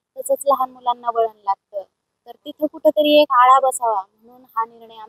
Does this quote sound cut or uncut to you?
uncut